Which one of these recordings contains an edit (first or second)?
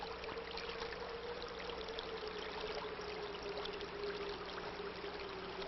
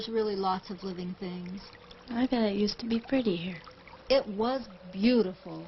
first